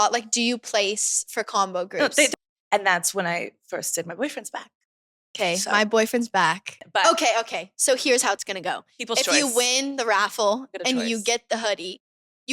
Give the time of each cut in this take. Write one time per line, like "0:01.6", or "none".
0:02.3
0:06.7